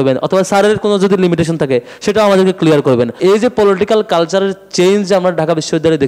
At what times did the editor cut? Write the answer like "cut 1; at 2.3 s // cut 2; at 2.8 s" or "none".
cut 1; at 3.2 s

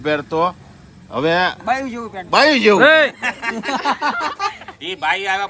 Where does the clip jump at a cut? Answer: none

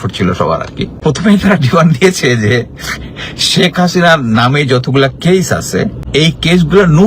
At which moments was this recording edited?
cut 1; at 1.0 s // cut 2; at 6.0 s

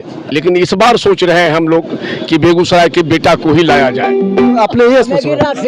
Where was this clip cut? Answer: cut 1; at 4.6 s

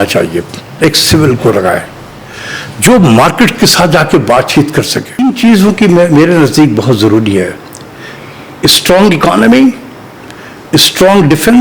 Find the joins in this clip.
cut 1; at 0.8 s // cut 2; at 5.2 s

